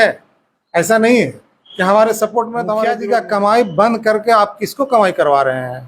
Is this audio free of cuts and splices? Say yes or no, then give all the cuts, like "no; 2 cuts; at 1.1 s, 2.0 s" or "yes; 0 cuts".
no; 1 cut; at 2.8 s